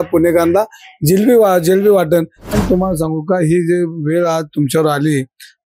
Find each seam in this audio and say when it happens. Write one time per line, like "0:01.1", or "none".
0:02.4